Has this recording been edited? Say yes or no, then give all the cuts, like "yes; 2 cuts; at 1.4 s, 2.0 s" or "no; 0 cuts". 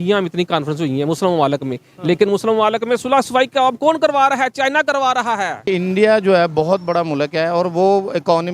yes; 1 cut; at 5.7 s